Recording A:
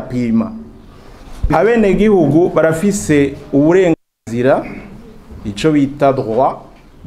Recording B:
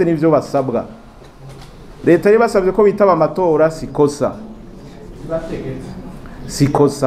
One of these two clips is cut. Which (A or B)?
A